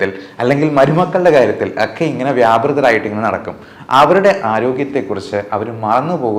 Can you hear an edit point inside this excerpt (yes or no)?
no